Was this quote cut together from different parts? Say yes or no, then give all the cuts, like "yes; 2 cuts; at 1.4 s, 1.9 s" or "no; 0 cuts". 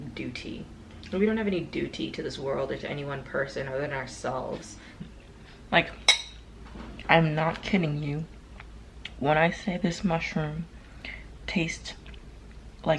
yes; 1 cut; at 5.0 s